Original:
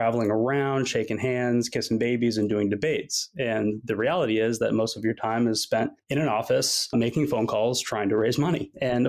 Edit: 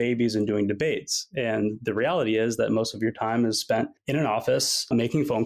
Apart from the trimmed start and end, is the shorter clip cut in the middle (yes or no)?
no